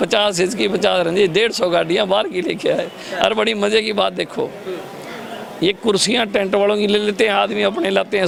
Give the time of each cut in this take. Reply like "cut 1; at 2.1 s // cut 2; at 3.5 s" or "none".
none